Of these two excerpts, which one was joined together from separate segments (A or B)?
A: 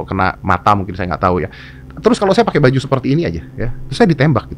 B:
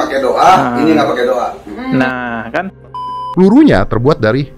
B